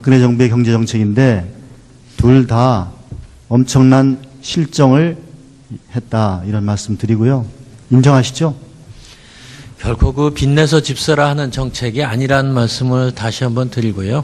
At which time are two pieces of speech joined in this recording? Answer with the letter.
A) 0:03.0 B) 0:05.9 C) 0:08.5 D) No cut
D